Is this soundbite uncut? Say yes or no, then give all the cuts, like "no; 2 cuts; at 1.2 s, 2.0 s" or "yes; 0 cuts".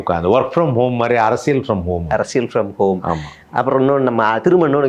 yes; 0 cuts